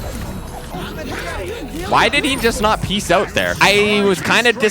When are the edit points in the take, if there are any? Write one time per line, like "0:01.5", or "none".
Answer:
0:03.6